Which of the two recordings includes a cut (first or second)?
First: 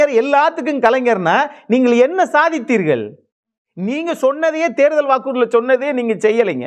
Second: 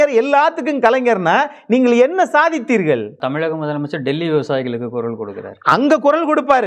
second